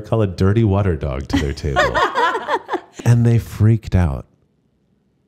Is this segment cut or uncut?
cut